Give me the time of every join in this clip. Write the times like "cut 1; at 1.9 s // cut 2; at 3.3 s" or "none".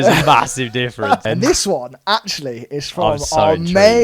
cut 1; at 1.2 s